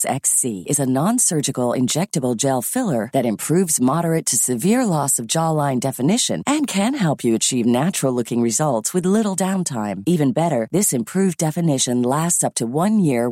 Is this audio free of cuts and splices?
yes; 0 cuts

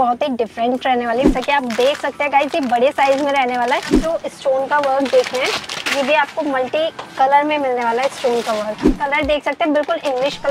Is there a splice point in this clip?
yes; 3 cuts; at 1.3 s, 4.0 s, 8.9 s

